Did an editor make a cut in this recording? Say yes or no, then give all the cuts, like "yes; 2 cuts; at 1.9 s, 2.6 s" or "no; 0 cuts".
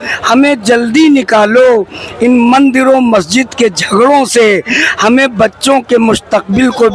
no; 0 cuts